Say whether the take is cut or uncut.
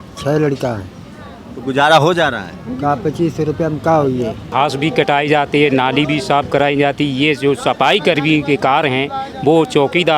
cut